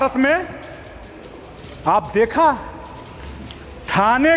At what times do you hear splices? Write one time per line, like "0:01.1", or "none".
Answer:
none